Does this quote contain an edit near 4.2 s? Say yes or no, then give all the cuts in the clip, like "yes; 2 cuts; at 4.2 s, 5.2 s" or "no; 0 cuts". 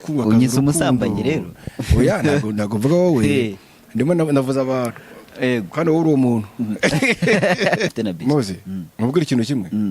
no; 1 cut; at 7.9 s